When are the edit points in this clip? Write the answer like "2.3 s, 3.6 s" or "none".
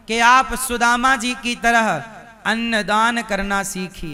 none